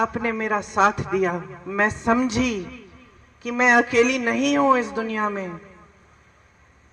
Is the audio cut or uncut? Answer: uncut